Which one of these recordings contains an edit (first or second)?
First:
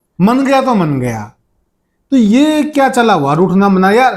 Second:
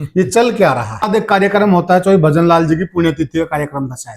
second